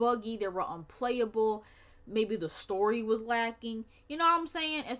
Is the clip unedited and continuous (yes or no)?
yes